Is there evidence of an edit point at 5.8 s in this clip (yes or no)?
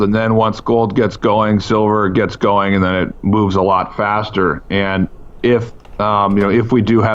yes